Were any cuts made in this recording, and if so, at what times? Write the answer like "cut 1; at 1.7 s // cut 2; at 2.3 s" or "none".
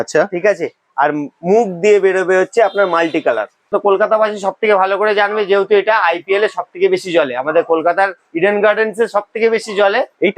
cut 1; at 3.6 s